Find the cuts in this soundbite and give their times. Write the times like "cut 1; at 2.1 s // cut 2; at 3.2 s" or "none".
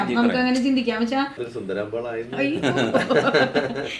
cut 1; at 1.5 s

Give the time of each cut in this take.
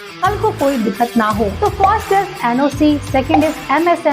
cut 1; at 1.5 s

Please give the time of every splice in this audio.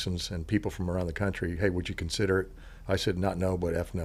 none

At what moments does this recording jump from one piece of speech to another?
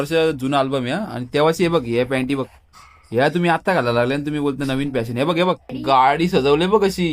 cut 1; at 5.7 s

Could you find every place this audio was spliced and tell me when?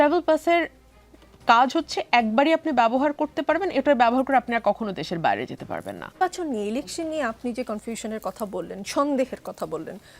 cut 1; at 6.2 s

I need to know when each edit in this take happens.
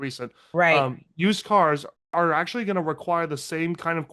cut 1; at 2.0 s

